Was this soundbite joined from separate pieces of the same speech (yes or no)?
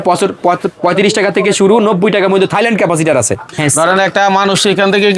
yes